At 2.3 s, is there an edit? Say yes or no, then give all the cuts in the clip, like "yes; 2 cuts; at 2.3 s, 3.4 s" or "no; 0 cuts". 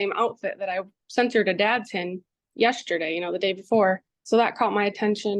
no; 2 cuts; at 1.0 s, 4.1 s